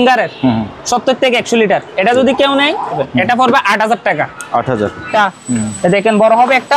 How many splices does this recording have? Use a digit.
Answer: 2